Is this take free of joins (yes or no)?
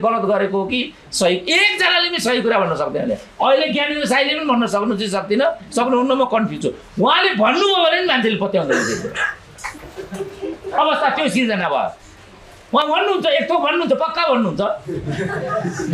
yes